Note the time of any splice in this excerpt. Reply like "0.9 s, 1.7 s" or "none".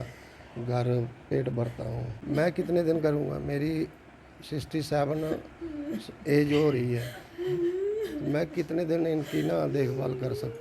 2.1 s